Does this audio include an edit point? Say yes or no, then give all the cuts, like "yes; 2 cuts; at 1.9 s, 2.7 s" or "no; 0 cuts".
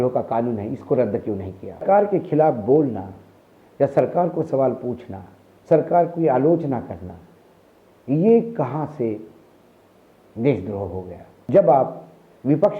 yes; 2 cuts; at 1.8 s, 11.4 s